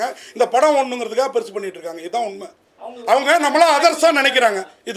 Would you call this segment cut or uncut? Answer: uncut